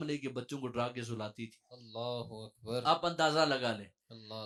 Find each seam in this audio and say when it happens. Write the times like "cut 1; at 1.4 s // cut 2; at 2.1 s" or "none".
none